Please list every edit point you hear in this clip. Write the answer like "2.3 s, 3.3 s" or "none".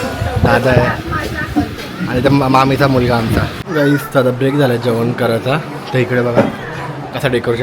3.6 s